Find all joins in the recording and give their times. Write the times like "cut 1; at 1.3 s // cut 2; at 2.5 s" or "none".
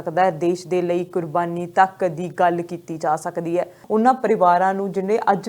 cut 1; at 3.8 s